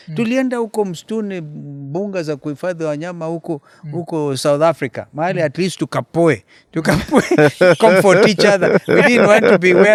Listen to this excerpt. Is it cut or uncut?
uncut